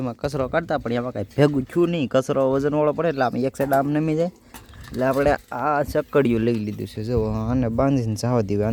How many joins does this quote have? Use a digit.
0